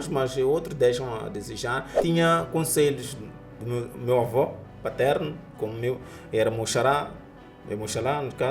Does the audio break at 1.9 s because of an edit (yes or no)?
yes